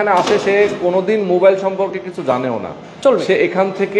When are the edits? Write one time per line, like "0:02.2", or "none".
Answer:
none